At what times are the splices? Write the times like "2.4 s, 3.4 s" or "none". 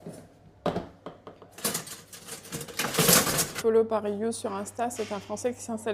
3.5 s